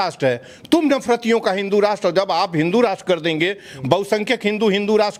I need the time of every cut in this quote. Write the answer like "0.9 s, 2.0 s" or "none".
none